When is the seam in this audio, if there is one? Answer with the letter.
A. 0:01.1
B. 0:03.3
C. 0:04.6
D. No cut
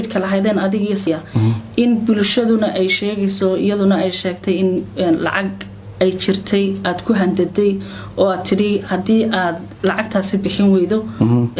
A